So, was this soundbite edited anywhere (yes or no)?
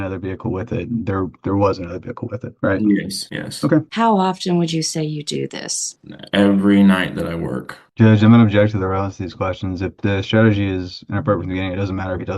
yes